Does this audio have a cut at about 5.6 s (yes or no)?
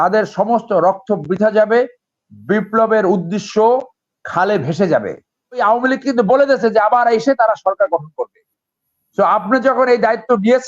yes